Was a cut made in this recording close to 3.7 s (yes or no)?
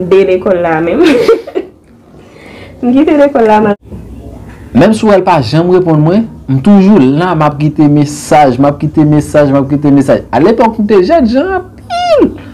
yes